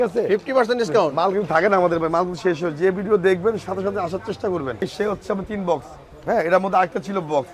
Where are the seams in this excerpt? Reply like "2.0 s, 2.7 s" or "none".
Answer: 4.8 s